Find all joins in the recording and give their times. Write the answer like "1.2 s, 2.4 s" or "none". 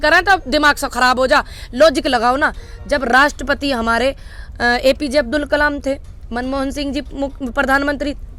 none